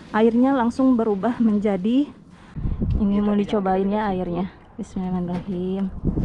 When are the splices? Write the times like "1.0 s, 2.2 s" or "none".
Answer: 2.3 s